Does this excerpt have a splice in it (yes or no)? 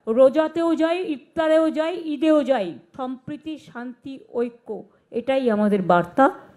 yes